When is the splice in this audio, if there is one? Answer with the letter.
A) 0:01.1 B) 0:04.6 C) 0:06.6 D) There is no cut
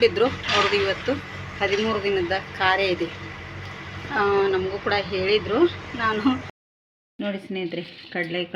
C